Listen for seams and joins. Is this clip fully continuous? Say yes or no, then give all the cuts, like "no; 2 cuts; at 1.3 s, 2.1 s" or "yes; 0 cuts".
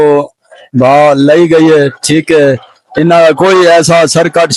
yes; 0 cuts